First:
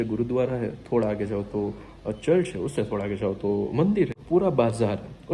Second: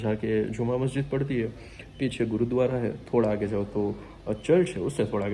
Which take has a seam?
first; 1 cut; at 4.2 s

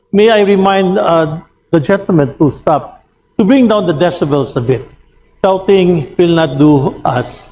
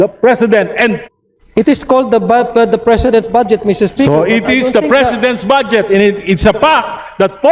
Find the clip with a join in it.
second; 1 cut; at 1.1 s

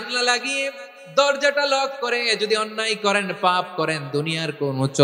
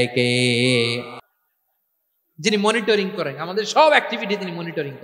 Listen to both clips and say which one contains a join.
second; 1 cut; at 1.2 s

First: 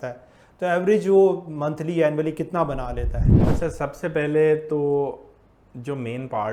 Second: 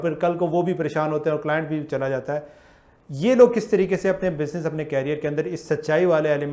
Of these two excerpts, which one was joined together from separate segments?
first; 1 cut; at 3.3 s

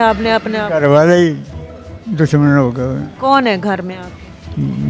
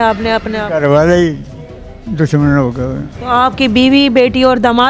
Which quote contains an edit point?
second; 1 cut; at 3.1 s

